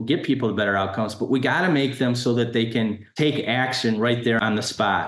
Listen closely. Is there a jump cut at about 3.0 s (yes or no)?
yes